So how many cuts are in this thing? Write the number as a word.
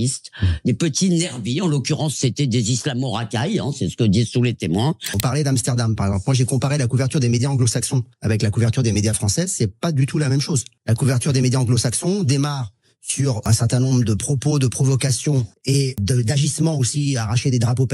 five